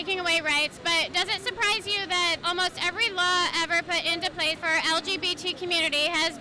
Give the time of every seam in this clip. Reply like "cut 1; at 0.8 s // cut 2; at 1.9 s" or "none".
cut 1; at 2.4 s // cut 2; at 4.6 s